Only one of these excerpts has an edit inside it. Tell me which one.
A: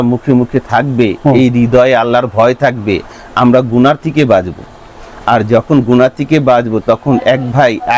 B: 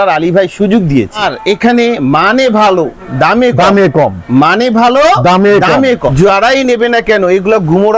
B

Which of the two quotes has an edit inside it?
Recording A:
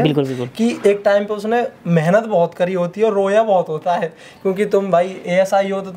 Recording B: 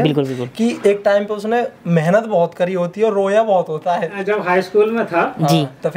B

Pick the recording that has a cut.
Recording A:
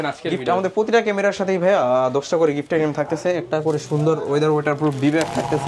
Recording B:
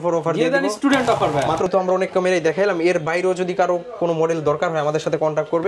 B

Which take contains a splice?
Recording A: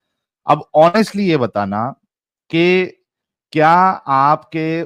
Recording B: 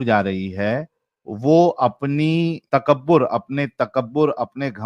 B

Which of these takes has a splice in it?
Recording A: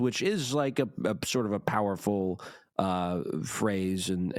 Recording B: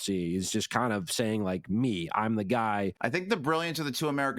B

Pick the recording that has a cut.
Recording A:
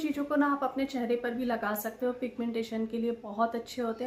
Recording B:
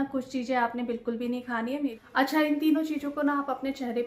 B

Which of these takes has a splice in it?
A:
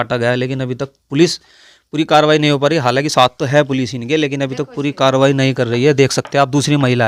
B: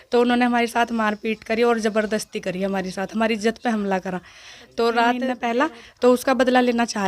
B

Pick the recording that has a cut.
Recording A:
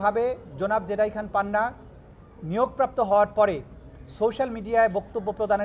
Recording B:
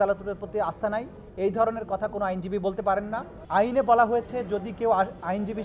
B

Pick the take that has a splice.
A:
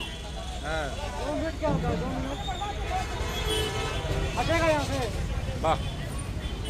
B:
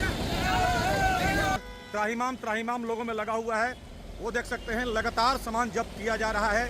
B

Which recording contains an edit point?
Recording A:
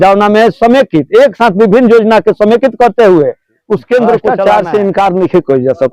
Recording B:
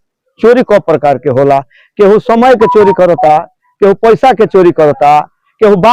A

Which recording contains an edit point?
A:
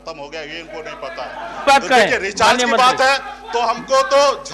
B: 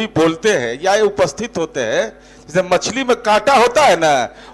A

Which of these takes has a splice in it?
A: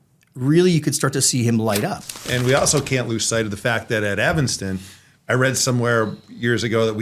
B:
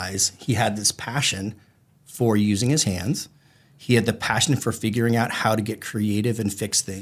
A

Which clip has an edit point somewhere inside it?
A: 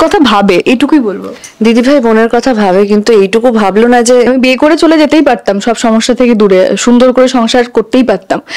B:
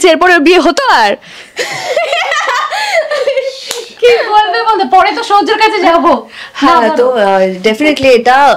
A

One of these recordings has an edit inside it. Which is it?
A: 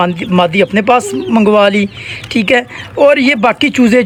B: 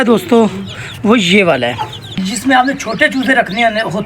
B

